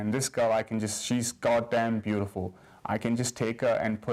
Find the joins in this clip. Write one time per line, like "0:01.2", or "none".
none